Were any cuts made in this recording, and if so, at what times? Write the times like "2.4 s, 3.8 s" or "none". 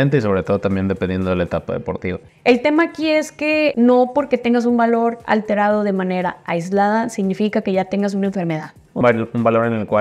2.3 s, 3.7 s, 9.0 s